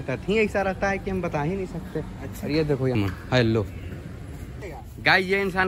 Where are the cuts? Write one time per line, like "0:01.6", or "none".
0:03.0
0:04.5